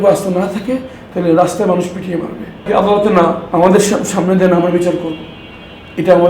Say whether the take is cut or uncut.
cut